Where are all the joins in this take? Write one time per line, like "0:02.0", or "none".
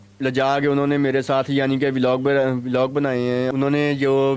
0:03.5